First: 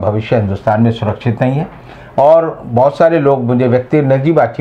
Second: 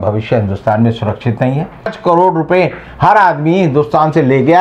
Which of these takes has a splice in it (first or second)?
second